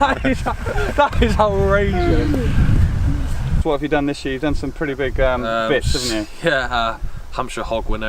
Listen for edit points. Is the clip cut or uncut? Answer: cut